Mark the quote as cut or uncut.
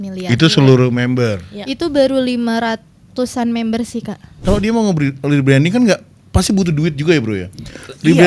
cut